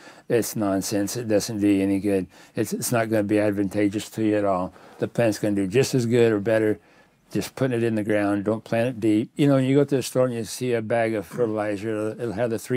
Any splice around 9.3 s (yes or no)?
yes